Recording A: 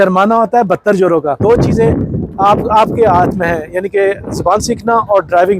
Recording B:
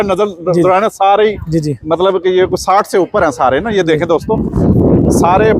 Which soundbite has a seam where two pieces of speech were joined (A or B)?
A